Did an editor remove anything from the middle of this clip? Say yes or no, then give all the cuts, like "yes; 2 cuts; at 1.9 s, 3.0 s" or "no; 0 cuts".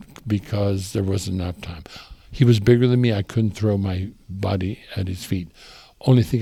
no; 0 cuts